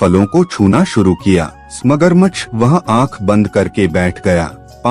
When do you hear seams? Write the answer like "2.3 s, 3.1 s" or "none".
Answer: 1.6 s